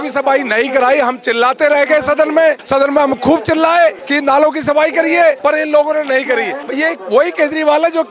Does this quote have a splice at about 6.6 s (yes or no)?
yes